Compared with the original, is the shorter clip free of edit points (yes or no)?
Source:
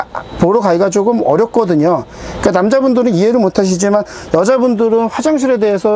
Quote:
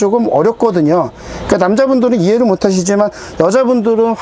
yes